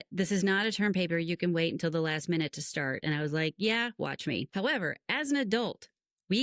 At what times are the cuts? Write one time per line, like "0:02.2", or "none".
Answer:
0:04.5